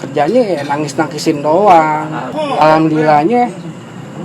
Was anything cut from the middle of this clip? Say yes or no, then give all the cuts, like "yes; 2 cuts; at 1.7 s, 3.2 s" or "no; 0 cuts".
yes; 1 cut; at 2.3 s